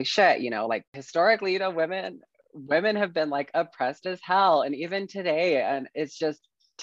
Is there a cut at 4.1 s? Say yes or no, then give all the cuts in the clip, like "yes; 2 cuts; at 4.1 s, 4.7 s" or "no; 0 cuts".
no; 1 cut; at 1.0 s